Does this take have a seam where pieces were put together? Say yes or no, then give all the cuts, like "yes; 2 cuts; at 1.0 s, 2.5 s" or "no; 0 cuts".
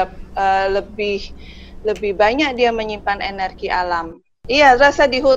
yes; 1 cut; at 4.1 s